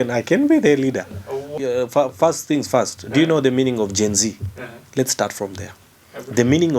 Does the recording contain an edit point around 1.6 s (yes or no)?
yes